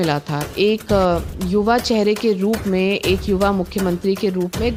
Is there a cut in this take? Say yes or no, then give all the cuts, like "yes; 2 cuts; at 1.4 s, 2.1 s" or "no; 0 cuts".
no; 0 cuts